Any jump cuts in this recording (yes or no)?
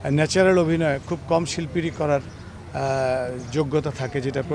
no